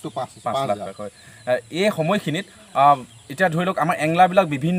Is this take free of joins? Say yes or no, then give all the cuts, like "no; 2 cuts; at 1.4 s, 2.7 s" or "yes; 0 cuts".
yes; 0 cuts